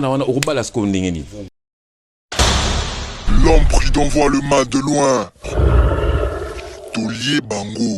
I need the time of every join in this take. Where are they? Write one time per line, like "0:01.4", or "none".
0:01.4